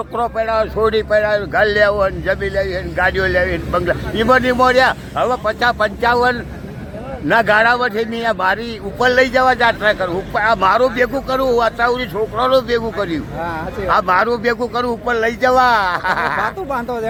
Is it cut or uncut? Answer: uncut